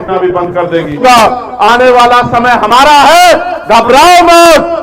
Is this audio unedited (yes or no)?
no